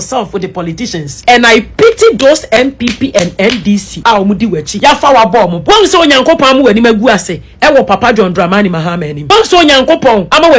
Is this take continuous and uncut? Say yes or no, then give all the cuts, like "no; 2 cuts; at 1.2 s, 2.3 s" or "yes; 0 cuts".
yes; 0 cuts